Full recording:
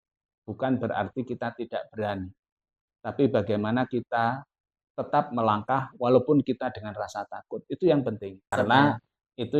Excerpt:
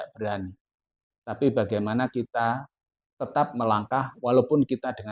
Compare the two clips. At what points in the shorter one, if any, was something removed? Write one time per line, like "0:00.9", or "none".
none